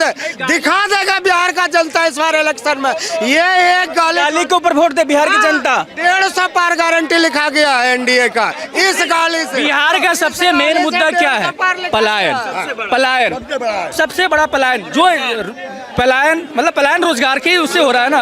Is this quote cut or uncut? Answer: uncut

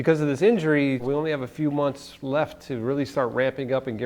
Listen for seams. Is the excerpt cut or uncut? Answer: cut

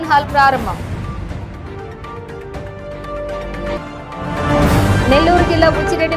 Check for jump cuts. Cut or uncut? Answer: uncut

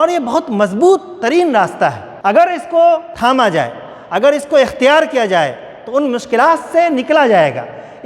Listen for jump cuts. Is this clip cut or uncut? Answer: cut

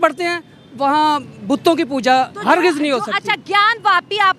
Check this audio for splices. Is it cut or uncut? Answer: uncut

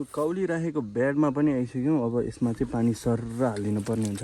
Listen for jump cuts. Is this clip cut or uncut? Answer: uncut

